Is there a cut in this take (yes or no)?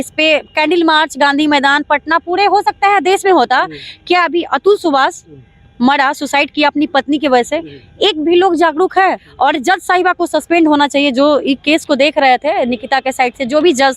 yes